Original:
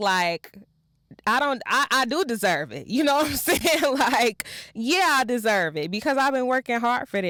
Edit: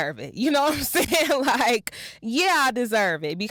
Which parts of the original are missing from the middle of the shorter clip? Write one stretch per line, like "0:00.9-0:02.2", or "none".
none